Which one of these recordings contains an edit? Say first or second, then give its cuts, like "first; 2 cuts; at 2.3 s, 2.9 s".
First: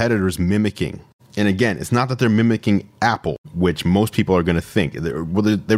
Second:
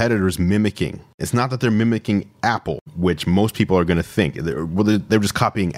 second; 1 cut; at 1.2 s